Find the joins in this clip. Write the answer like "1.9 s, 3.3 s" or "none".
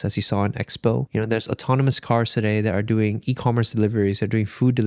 1.1 s